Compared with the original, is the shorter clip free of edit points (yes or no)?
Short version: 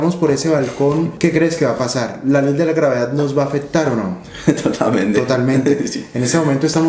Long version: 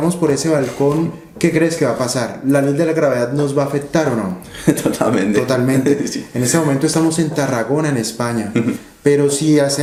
no